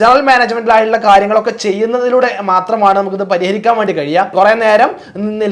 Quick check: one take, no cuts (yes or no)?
no